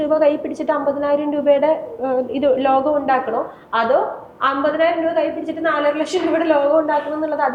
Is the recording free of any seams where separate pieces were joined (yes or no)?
yes